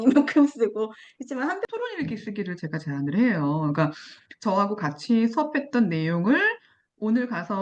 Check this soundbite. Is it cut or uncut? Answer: cut